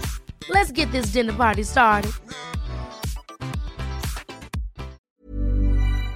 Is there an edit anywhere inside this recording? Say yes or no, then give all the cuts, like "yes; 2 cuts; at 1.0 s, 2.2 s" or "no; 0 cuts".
yes; 1 cut; at 5.0 s